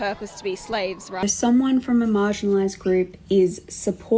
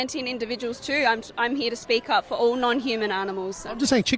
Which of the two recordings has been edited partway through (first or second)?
first